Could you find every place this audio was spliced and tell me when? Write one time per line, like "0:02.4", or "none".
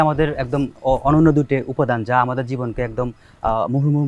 none